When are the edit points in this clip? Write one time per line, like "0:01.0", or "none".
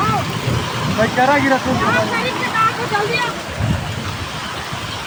none

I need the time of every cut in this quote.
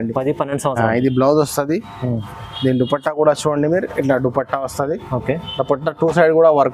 none

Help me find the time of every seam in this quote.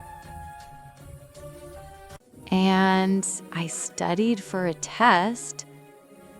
0:02.3

